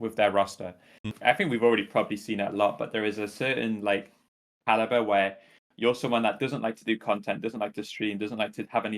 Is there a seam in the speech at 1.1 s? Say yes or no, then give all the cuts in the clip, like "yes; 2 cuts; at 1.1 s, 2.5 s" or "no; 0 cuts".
yes; 1 cut; at 1.1 s